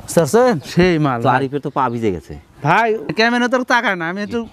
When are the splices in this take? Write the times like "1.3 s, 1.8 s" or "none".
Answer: none